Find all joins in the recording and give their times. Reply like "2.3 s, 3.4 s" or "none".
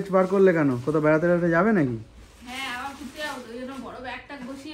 none